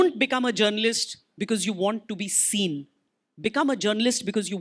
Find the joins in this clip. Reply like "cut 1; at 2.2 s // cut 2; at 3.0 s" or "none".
none

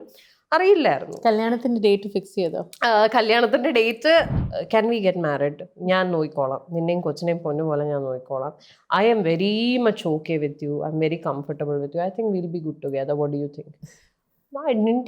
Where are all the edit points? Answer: cut 1; at 4.3 s

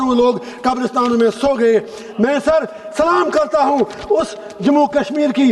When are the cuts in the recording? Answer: none

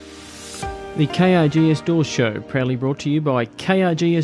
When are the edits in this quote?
cut 1; at 0.9 s

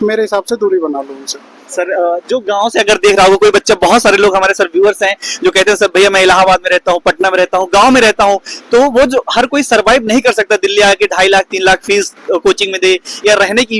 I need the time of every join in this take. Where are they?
none

